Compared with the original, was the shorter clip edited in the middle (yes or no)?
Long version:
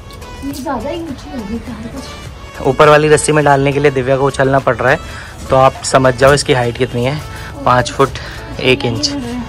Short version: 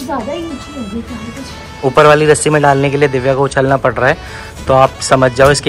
yes